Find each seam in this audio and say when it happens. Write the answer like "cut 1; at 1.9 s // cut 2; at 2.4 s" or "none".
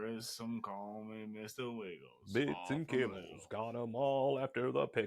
cut 1; at 2.1 s